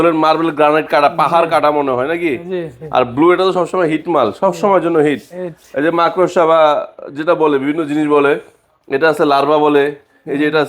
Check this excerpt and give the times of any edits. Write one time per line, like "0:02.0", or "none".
none